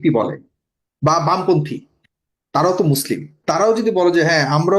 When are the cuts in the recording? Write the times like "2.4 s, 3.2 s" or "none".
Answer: 3.3 s